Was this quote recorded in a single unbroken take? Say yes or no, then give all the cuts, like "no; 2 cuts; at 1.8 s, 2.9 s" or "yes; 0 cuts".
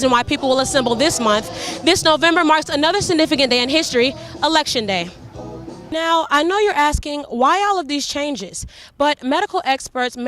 no; 1 cut; at 5.9 s